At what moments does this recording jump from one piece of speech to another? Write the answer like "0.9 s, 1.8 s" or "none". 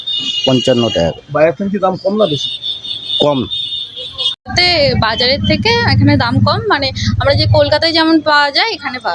4.5 s